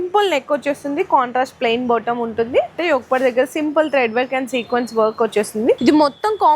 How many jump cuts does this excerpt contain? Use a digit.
2